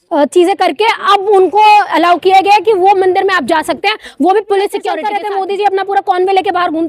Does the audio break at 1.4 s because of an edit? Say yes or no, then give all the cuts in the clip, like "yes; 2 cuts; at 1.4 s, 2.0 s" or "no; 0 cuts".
no; 1 cut; at 5.0 s